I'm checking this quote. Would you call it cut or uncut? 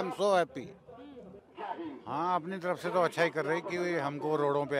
cut